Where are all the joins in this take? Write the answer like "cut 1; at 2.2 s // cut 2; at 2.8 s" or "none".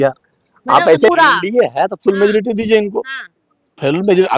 cut 1; at 1.1 s